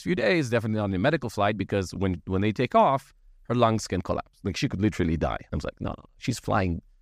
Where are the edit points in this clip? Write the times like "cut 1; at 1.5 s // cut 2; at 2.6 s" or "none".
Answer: cut 1; at 5.4 s